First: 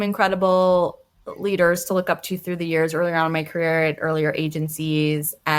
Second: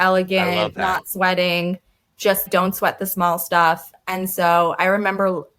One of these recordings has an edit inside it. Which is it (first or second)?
second